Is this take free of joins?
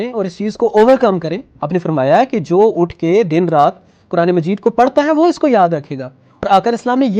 no; 2 cuts; at 1.4 s, 6.5 s

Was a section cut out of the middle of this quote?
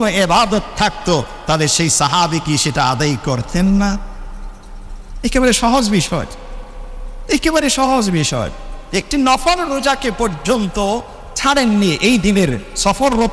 no; 0 cuts

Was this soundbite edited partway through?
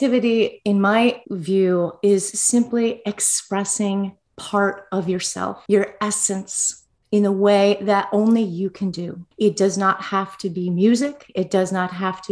yes; 1 cut; at 1.3 s

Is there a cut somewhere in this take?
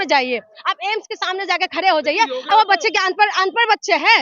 yes; 1 cut; at 2.5 s

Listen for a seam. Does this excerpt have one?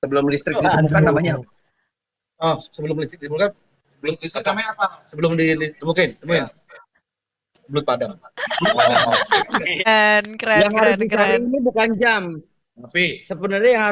yes; 1 cut; at 9.9 s

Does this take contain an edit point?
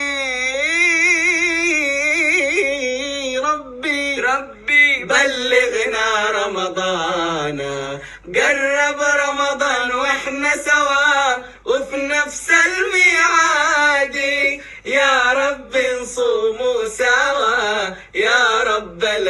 no; 0 cuts

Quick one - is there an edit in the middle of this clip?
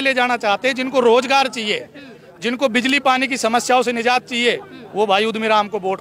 no; 0 cuts

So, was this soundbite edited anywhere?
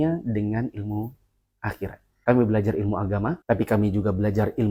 no; 0 cuts

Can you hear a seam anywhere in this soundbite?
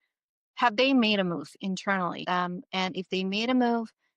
yes; 1 cut; at 2.2 s

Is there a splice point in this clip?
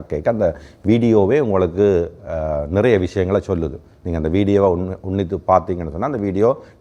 no; 0 cuts

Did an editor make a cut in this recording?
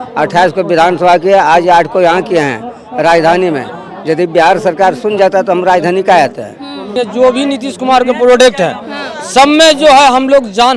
yes; 1 cut; at 6.8 s

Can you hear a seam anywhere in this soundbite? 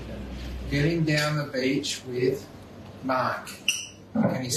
no; 0 cuts

